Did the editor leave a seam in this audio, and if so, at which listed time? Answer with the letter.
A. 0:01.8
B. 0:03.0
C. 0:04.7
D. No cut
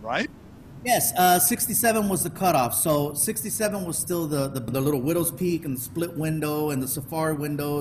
C